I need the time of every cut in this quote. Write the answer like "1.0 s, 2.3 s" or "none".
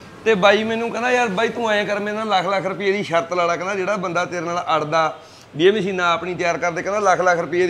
none